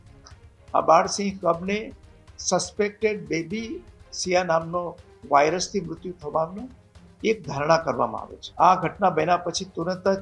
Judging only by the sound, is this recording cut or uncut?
cut